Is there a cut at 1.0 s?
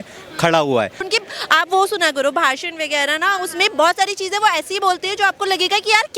yes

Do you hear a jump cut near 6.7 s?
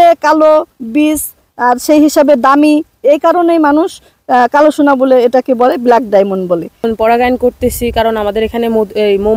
yes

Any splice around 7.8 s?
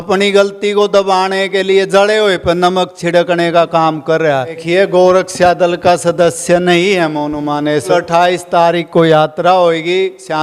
yes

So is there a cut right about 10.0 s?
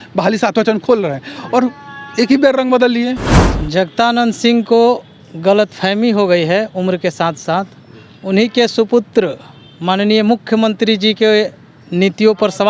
no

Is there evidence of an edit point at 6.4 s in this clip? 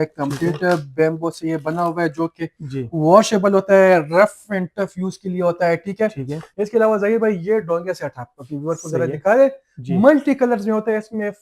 yes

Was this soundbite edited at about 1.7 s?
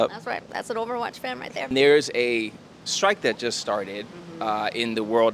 yes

